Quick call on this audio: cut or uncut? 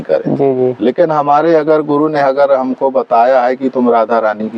uncut